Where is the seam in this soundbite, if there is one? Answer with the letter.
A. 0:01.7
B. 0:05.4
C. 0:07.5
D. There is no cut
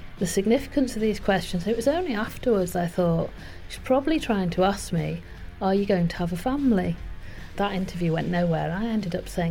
C